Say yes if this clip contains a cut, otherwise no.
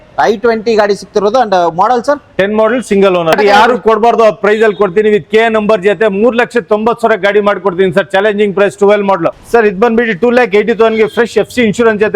yes